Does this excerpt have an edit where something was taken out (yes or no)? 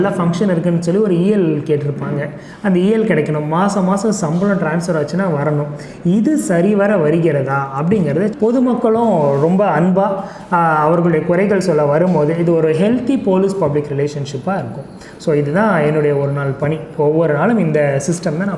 yes